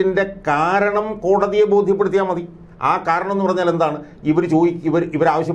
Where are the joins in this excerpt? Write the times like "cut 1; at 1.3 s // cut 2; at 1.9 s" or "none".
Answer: none